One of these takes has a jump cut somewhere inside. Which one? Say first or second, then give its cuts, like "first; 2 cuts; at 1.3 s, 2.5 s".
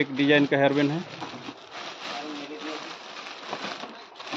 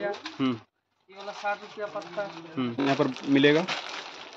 second; 1 cut; at 2.7 s